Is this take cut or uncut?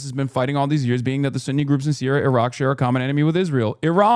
uncut